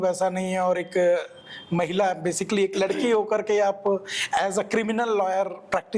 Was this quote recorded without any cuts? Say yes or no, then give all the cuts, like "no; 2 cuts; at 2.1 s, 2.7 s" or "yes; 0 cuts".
yes; 0 cuts